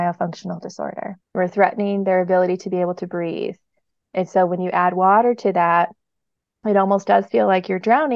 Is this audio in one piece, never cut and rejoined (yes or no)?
no